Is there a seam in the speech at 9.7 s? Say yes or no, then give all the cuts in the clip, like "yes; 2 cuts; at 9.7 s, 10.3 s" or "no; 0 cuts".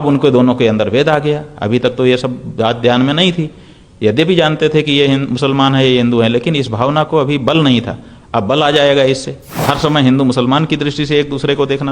yes; 1 cut; at 9.7 s